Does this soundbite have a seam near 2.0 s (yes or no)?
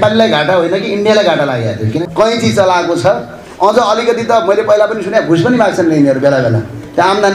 yes